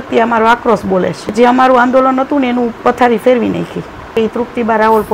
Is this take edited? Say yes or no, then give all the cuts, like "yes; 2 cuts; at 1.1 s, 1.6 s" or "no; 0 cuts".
yes; 2 cuts; at 1.2 s, 4.1 s